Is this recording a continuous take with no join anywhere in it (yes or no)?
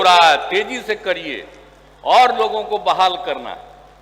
yes